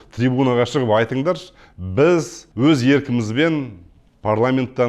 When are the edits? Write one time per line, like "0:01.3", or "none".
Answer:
0:02.4